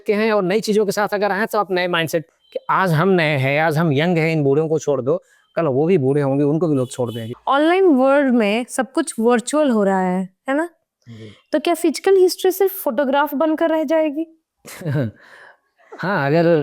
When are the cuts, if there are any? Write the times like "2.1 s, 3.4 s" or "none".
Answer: 2.3 s, 7.3 s